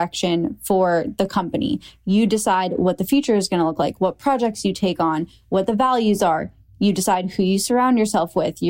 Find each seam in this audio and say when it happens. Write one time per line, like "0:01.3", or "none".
none